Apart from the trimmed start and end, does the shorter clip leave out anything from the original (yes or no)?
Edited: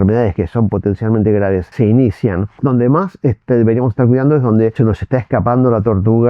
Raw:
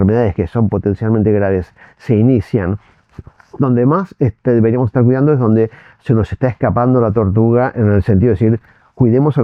yes